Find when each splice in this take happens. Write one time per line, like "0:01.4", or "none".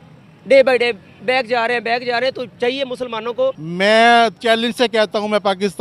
0:03.6

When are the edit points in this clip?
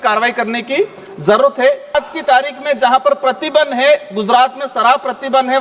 0:01.9

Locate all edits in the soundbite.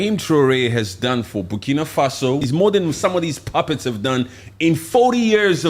0:02.4

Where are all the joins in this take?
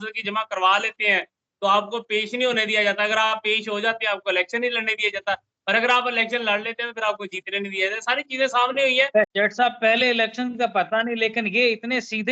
0:09.3

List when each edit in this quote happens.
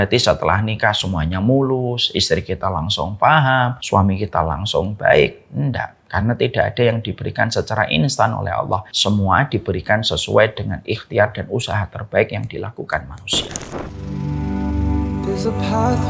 0:03.8
0:08.9
0:13.9

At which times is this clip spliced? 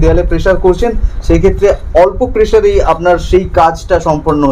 none

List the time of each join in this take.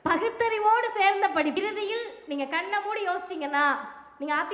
0:01.6

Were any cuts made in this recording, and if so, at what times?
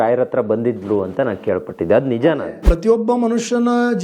0:02.6

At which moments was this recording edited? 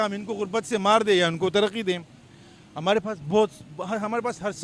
none

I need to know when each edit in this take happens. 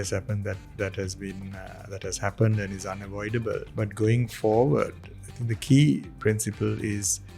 0:03.7

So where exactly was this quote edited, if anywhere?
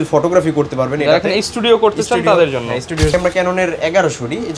0:03.1

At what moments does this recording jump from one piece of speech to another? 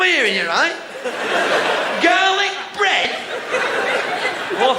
none

